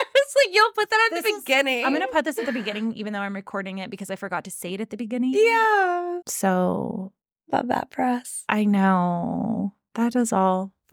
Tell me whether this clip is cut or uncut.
cut